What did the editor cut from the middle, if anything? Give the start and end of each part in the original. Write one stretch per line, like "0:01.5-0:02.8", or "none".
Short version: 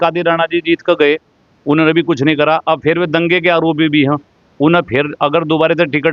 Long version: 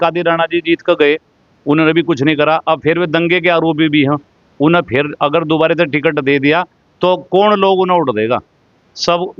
none